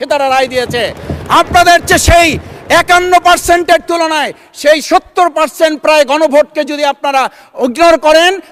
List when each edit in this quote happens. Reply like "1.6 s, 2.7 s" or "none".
none